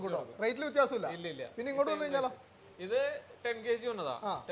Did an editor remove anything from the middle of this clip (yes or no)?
no